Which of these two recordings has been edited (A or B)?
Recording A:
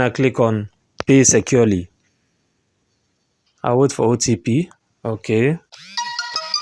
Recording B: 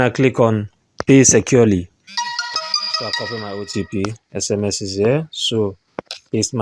B